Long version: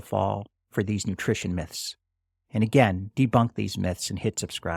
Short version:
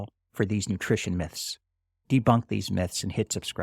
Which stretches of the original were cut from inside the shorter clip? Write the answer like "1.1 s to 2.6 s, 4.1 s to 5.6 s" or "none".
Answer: 2.4 s to 3.0 s